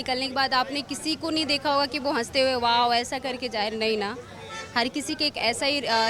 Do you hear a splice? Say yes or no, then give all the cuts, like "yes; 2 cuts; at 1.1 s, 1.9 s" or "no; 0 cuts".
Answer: no; 0 cuts